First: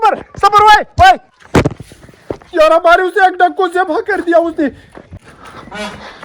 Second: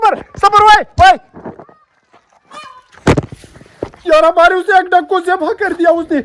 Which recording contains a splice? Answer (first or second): first